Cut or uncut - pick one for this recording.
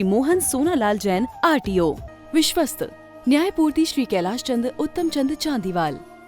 cut